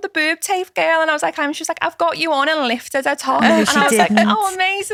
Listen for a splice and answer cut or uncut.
uncut